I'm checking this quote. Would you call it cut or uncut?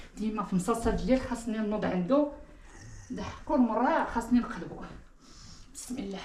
uncut